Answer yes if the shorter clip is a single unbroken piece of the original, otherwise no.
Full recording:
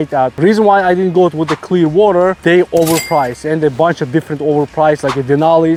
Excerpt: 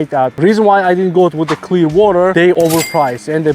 no